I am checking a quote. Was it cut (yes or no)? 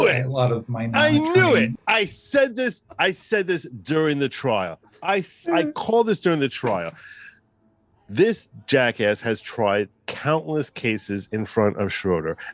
no